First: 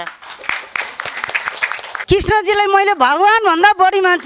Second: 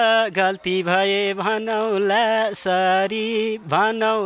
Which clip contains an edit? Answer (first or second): first